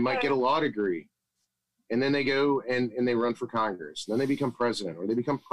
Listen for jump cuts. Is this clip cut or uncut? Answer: uncut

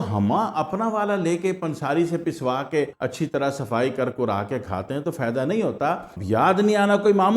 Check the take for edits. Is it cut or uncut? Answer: cut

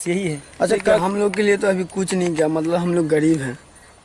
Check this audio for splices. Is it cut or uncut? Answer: cut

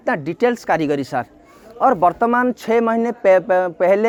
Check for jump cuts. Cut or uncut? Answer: uncut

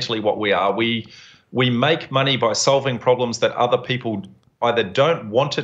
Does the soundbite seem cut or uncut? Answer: uncut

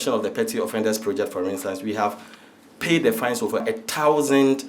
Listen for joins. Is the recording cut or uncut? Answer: cut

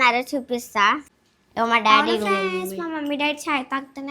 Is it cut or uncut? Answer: cut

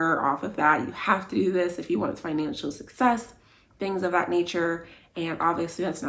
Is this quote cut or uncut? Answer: uncut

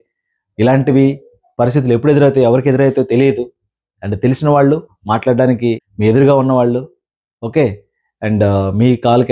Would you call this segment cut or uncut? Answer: cut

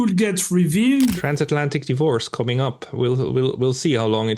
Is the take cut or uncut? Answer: cut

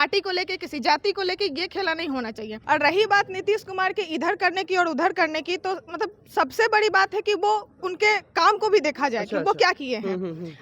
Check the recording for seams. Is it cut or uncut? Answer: cut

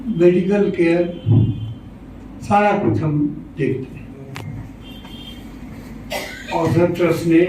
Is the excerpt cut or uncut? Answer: cut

